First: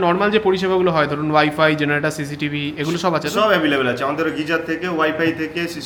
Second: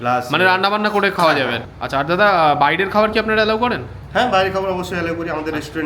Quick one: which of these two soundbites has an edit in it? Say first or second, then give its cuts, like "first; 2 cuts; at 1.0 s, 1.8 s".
second; 1 cut; at 1.6 s